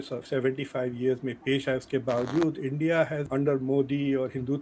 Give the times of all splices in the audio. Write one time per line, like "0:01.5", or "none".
0:03.2